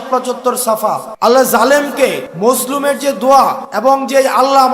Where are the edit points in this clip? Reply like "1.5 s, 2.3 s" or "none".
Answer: 1.1 s, 2.3 s, 3.7 s